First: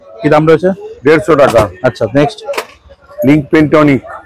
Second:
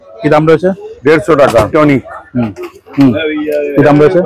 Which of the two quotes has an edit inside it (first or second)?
second